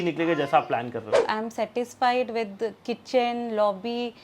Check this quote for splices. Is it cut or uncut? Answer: cut